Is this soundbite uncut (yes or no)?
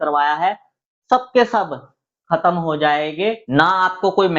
no